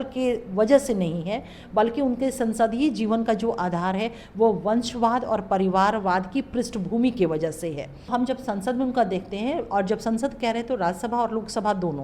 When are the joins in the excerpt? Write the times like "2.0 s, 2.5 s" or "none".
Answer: 8.1 s